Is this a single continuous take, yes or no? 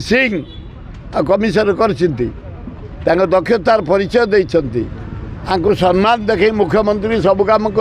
yes